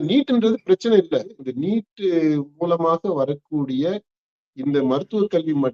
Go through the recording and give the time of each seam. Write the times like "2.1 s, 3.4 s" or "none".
1.4 s